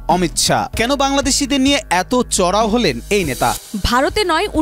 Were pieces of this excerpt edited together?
yes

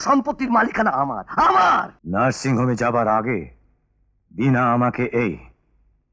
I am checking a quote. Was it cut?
yes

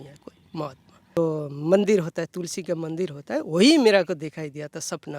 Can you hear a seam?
yes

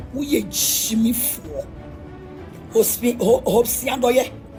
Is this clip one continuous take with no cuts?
yes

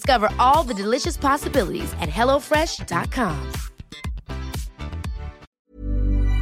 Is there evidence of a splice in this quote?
yes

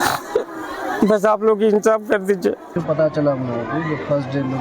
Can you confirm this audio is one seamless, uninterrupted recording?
yes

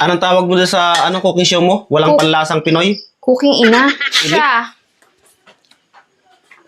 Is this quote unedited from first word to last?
no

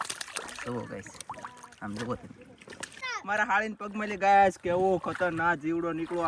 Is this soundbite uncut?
no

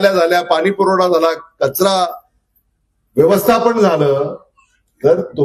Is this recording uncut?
yes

